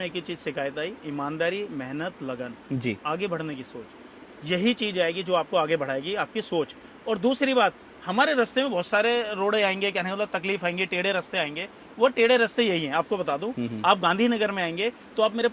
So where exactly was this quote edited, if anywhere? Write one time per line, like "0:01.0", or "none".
none